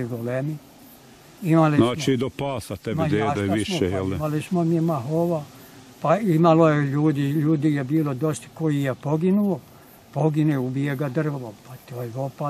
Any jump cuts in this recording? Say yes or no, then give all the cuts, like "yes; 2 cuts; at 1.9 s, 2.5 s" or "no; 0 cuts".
no; 0 cuts